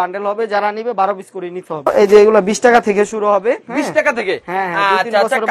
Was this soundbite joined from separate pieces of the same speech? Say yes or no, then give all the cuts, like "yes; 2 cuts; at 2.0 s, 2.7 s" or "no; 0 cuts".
yes; 1 cut; at 1.9 s